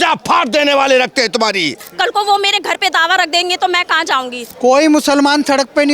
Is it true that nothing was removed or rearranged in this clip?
no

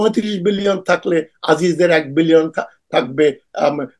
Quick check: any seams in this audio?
no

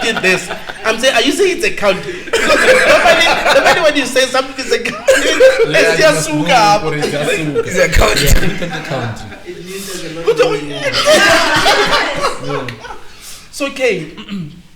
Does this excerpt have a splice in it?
no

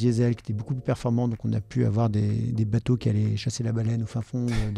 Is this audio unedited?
yes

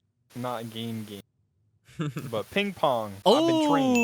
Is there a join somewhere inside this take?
yes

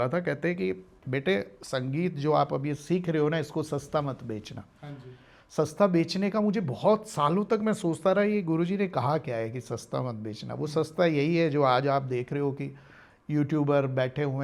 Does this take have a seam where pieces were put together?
no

